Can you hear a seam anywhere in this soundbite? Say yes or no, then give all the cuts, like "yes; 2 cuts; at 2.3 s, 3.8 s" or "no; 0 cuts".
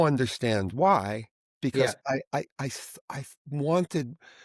no; 0 cuts